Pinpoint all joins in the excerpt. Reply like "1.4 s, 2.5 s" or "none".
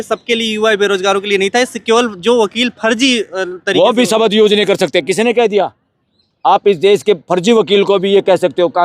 none